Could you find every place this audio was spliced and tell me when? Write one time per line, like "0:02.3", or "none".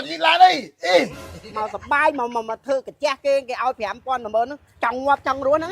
0:01.2